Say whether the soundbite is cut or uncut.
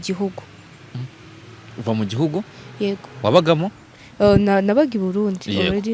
uncut